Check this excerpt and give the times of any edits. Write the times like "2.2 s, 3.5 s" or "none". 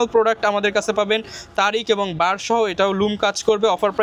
none